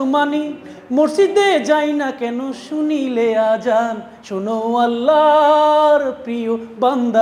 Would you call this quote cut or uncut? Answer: uncut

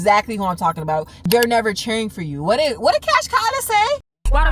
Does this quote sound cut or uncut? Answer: cut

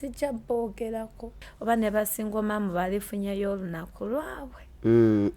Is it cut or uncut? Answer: cut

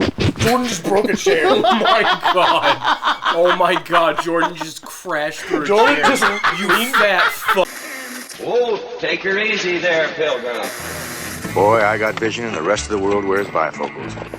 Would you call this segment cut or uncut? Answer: cut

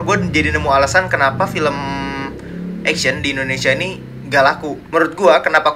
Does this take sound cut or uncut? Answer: cut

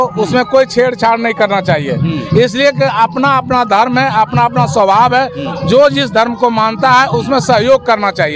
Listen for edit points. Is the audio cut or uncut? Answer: uncut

